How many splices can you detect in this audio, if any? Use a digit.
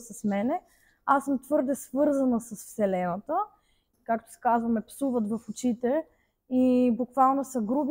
1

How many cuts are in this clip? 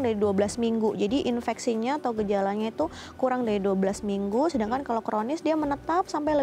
0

